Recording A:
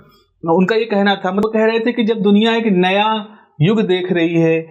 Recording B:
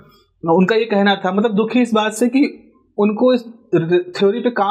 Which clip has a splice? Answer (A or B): A